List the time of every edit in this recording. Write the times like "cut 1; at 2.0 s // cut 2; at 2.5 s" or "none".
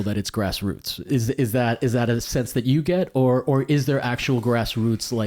none